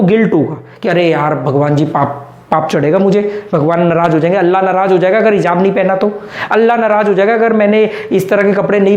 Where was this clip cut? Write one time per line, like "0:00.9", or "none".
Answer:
none